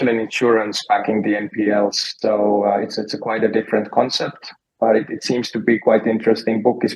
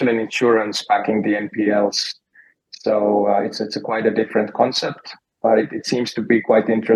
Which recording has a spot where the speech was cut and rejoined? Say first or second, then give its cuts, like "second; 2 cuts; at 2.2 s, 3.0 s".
first; 1 cut; at 2.1 s